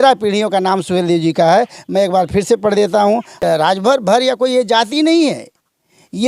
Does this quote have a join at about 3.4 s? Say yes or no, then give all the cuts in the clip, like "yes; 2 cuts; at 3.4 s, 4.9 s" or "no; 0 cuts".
yes; 1 cut; at 3.4 s